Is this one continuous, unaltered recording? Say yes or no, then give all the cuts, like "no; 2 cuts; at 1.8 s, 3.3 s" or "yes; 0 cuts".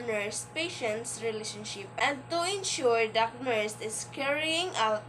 no; 1 cut; at 1.9 s